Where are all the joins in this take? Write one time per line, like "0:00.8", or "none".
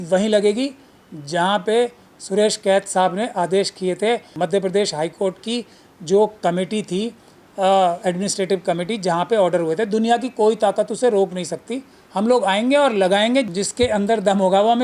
0:04.4
0:13.6